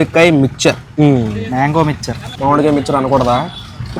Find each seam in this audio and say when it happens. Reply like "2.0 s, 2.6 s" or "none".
none